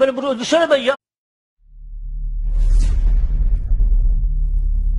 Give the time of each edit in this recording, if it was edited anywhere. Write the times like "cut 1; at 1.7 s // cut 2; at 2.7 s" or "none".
none